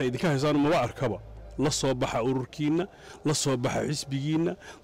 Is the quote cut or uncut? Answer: uncut